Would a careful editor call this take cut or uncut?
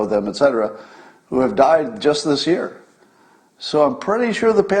uncut